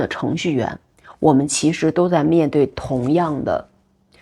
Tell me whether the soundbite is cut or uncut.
uncut